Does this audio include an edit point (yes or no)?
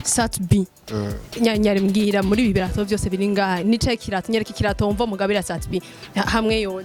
no